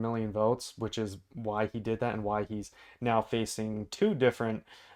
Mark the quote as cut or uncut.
uncut